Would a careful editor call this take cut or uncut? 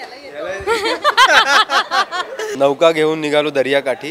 cut